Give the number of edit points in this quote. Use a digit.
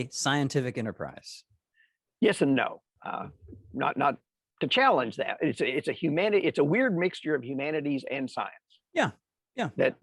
1